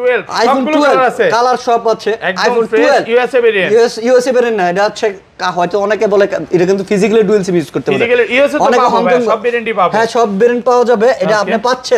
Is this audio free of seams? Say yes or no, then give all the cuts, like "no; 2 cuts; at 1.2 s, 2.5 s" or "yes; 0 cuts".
yes; 0 cuts